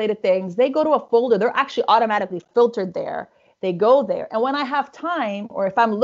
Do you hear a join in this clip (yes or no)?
no